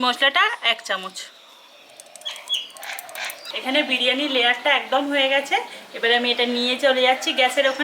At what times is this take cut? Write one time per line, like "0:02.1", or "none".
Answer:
0:03.5

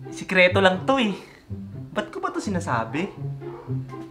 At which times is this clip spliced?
0:03.2

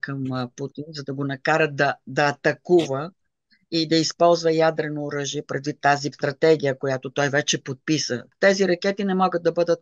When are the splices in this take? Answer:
0:06.2
0:08.2

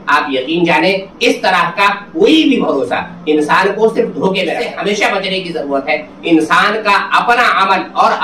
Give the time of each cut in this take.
0:04.7

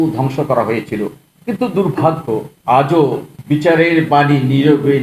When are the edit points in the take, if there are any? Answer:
0:01.3
0:02.5
0:03.3

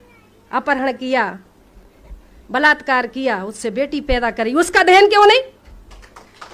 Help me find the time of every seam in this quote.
none

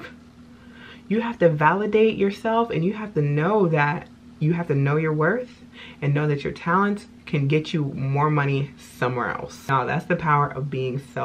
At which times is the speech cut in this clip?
0:09.7

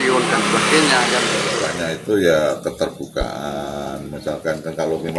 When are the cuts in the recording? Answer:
0:01.4

